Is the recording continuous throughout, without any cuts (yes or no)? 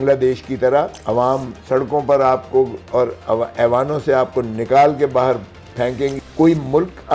no